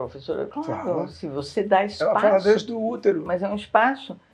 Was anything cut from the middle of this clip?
yes; 1 cut; at 3.2 s

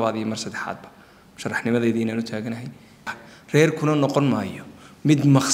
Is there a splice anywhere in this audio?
yes; 1 cut; at 3.2 s

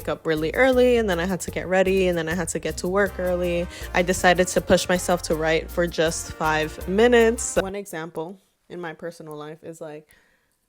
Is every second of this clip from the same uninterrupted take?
no; 1 cut; at 7.6 s

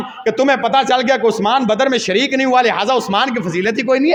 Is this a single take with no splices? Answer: yes; 0 cuts

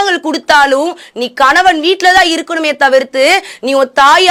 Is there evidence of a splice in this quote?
no; 0 cuts

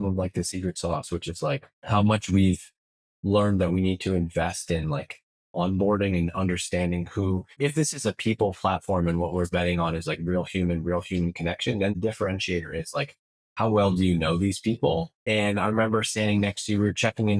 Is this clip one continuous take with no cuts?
no; 4 cuts; at 1.7 s, 7.6 s, 11.9 s, 15.1 s

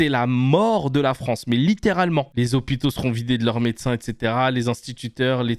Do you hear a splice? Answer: no; 0 cuts

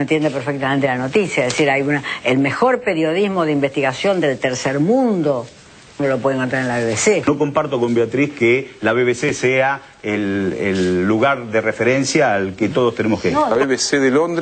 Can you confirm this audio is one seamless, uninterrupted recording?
no; 2 cuts; at 7.2 s, 13.5 s

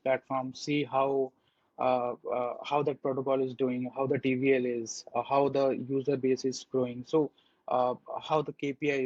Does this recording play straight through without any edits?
yes; 0 cuts

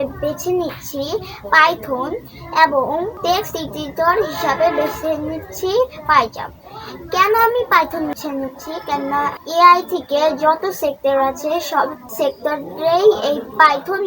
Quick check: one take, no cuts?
no; 4 cuts; at 3.2 s, 8.1 s, 9.4 s, 12.0 s

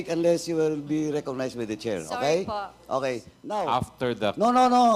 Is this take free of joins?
no; 1 cut; at 3.6 s

